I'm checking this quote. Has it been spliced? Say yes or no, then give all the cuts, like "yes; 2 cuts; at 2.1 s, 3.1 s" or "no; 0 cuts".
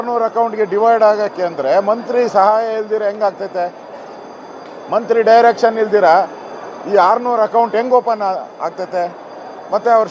no; 0 cuts